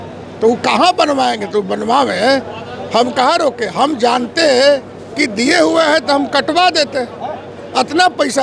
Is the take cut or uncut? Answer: uncut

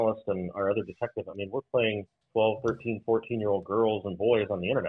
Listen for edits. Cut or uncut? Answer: cut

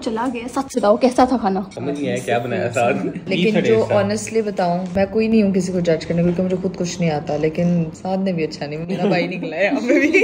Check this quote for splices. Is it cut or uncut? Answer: cut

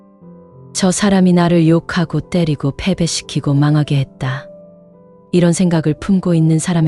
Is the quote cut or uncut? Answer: uncut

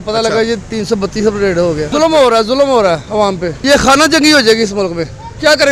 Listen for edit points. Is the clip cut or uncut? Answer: uncut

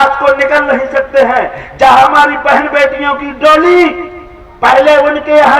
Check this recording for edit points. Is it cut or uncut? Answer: uncut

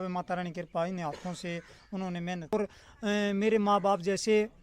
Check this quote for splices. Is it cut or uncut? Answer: cut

